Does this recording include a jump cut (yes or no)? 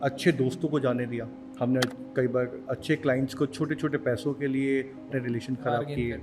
yes